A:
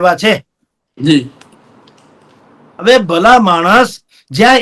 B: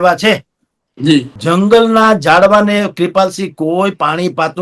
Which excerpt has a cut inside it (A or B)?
B